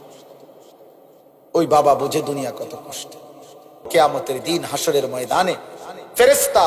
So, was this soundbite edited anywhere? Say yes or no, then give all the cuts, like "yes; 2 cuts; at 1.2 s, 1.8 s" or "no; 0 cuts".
yes; 1 cut; at 3.7 s